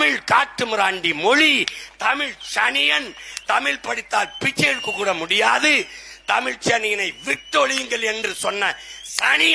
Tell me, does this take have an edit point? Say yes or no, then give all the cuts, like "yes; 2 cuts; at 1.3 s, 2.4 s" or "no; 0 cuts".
no; 0 cuts